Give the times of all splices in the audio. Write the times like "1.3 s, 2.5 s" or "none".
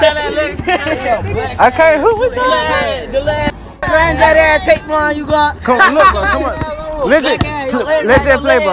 3.9 s